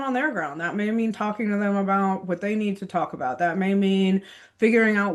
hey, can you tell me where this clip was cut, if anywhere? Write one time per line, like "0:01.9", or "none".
none